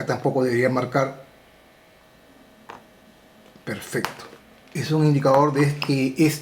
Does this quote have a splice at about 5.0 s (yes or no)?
no